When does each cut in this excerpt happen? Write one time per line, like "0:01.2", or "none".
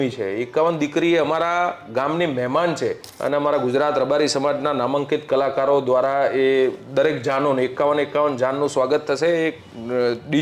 0:03.1